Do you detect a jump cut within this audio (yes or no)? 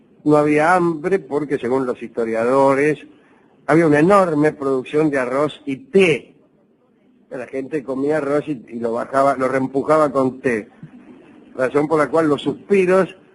yes